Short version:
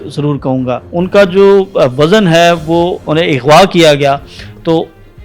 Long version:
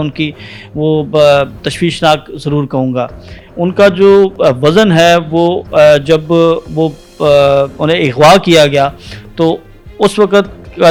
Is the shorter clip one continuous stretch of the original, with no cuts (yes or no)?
no